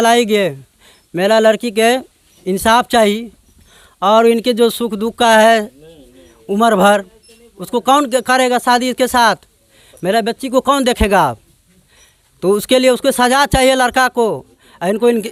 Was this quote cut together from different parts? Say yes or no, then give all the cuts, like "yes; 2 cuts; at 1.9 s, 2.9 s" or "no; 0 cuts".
no; 0 cuts